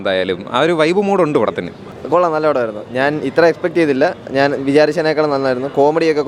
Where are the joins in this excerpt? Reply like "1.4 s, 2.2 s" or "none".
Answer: none